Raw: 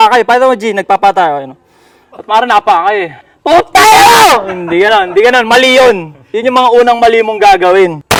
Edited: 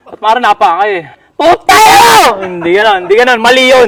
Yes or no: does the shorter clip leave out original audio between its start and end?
no